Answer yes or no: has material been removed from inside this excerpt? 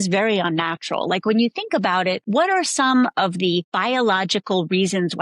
yes